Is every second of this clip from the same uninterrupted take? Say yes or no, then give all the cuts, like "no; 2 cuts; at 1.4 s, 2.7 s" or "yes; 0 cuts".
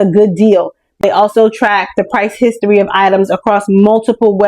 no; 1 cut; at 1.0 s